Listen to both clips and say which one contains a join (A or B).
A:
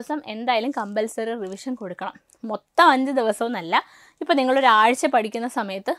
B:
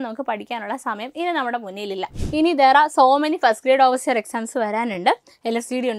B